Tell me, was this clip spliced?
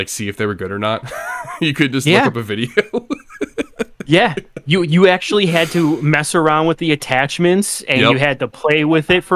no; 0 cuts

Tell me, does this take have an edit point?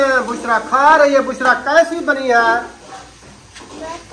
no; 0 cuts

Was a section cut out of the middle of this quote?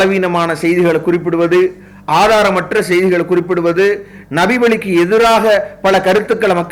no; 0 cuts

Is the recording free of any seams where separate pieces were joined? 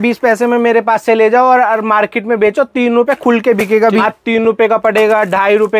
no; 1 cut; at 4.0 s

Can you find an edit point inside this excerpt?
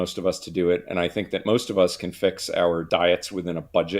yes; 1 cut; at 2.9 s

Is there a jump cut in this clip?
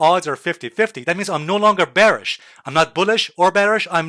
no; 0 cuts

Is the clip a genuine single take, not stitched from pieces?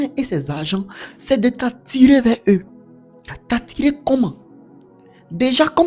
yes; 0 cuts

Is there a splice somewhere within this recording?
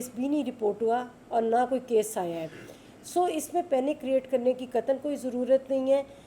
no; 0 cuts

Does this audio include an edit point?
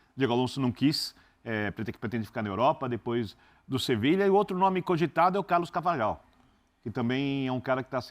no; 0 cuts

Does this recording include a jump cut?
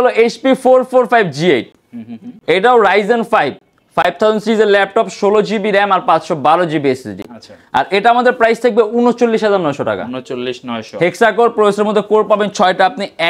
no; 0 cuts

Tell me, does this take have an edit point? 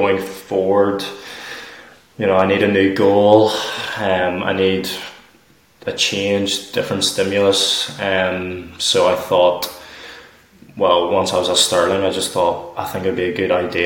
no; 0 cuts

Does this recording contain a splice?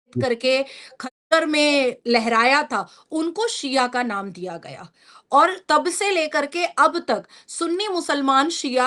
no; 0 cuts

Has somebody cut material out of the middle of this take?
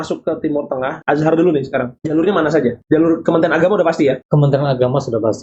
yes; 4 cuts; at 0.9 s, 2.0 s, 2.8 s, 4.2 s

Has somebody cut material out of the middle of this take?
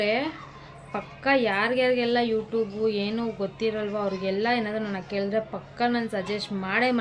no; 0 cuts

